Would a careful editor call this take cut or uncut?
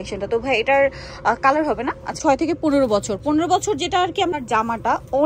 cut